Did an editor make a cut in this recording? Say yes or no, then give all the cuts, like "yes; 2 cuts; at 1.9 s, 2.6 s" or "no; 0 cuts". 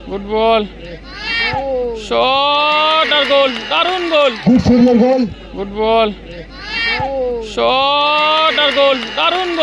yes; 1 cut; at 5.3 s